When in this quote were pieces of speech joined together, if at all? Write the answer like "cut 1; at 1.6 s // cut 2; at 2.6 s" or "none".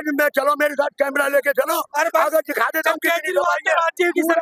none